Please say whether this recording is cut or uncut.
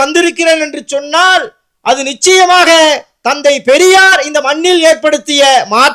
uncut